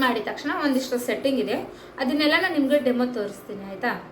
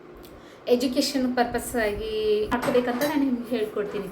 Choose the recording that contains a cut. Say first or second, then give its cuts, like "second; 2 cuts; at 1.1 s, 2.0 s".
second; 1 cut; at 2.5 s